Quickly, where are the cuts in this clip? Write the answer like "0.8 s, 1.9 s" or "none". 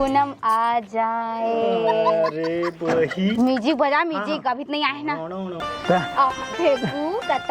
5.6 s